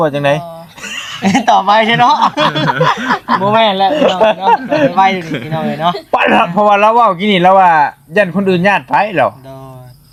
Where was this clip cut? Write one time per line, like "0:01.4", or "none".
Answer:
none